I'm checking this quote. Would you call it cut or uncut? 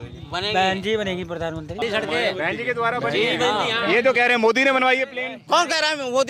cut